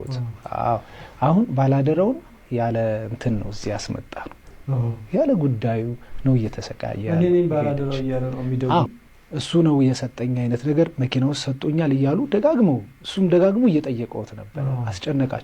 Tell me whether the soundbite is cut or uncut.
cut